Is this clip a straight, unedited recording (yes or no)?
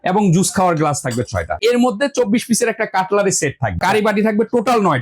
no